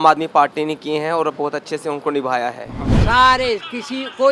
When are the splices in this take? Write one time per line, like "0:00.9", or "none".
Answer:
0:02.9